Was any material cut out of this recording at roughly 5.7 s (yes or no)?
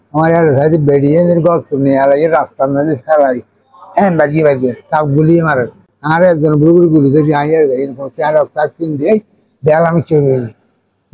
no